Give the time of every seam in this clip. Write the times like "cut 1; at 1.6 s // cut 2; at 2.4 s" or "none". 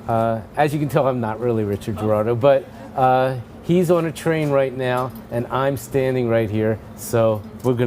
cut 1; at 1.1 s